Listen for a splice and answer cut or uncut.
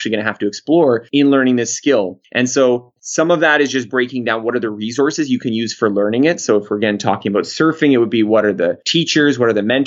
cut